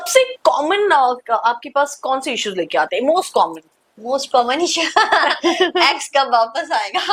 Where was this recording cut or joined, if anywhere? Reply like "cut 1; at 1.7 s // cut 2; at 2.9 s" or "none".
none